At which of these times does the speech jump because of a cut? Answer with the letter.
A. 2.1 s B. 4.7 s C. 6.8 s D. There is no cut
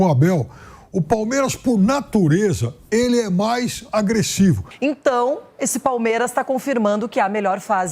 B